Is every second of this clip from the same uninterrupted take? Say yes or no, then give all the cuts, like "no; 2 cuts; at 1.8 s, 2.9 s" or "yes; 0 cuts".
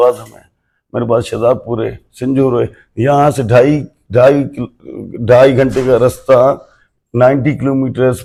yes; 0 cuts